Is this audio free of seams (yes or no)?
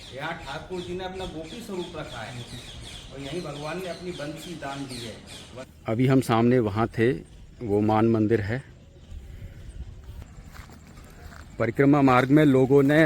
no